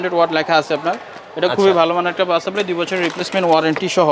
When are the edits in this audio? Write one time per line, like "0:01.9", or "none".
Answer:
none

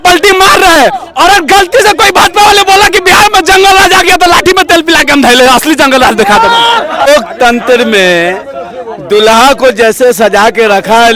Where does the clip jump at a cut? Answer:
none

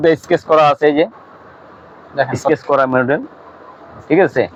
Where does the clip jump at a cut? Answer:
none

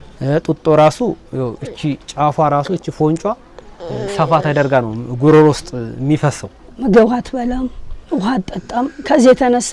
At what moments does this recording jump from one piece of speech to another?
0:06.6

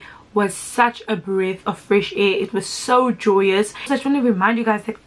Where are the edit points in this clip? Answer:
0:03.9

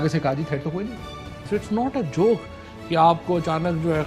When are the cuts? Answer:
0:01.4

